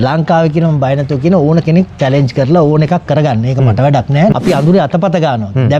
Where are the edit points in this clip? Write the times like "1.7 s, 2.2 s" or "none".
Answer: 4.3 s